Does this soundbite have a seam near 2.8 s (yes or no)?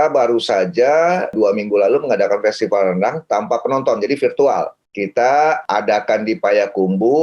no